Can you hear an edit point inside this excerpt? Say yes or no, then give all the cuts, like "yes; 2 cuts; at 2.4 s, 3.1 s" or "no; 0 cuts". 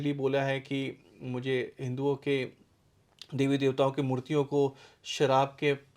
no; 0 cuts